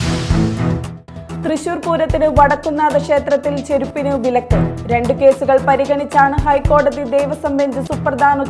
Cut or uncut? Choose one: cut